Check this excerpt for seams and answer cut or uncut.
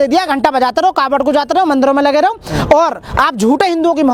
uncut